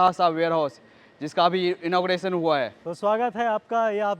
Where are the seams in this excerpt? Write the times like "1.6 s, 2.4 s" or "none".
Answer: 2.8 s